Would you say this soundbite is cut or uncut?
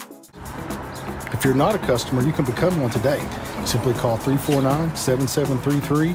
uncut